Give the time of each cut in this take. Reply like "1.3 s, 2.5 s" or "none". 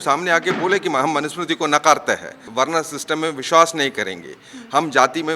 2.4 s